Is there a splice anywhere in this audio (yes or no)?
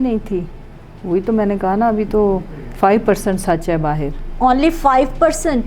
yes